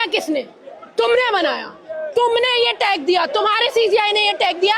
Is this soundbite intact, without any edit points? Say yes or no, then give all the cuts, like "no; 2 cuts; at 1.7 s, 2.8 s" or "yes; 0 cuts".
yes; 0 cuts